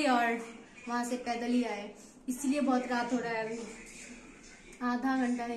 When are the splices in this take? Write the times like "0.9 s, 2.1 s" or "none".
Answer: none